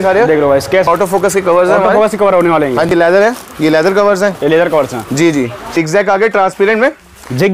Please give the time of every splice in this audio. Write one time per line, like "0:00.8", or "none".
0:00.9
0:02.9
0:05.7

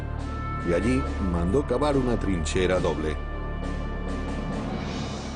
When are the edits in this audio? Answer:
none

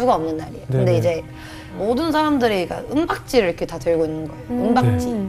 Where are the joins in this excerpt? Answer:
0:01.8

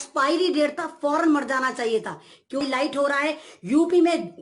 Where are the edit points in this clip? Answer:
0:02.6

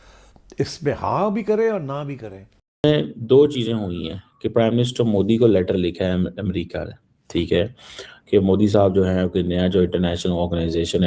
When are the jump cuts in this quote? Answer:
0:02.6

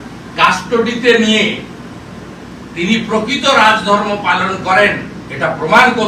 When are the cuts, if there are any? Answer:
none

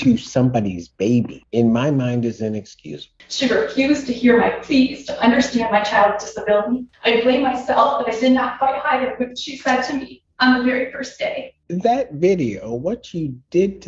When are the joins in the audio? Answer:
0:03.1
0:11.5

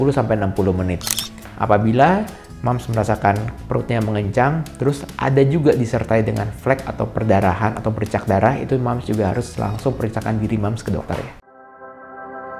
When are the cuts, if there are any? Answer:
0:01.1
0:11.4

